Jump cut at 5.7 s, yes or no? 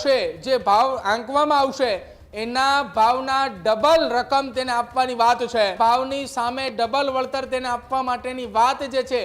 yes